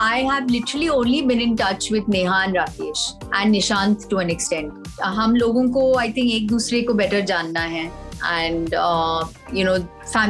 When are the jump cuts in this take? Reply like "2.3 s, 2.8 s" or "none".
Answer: 4.9 s